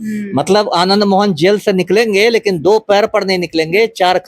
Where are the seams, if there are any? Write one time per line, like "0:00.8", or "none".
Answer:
none